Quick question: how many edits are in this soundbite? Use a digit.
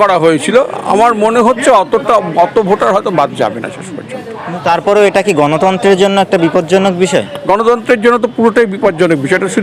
0